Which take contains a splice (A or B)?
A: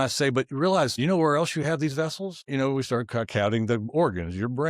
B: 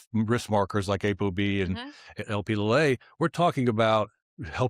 A